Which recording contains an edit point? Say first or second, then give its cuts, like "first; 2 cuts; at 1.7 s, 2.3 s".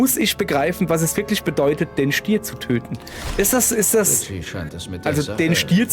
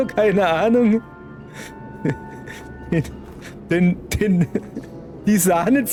first; 1 cut; at 5.0 s